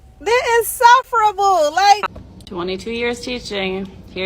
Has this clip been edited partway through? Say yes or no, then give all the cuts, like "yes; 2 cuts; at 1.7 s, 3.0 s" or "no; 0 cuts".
yes; 1 cut; at 2.0 s